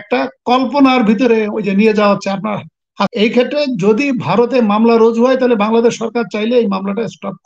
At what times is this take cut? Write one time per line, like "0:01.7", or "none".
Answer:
0:03.1